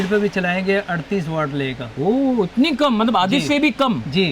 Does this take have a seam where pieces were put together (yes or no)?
no